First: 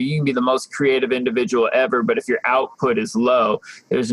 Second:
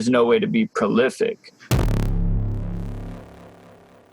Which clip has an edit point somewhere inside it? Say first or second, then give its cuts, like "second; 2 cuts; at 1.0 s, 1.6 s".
second; 1 cut; at 1.5 s